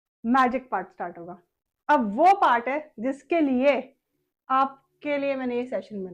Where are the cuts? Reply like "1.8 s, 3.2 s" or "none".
none